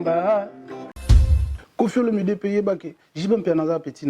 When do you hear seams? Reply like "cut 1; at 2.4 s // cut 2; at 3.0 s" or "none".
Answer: cut 1; at 1.1 s